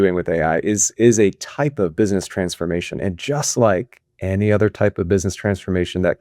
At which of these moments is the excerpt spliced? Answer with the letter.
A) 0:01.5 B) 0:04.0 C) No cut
C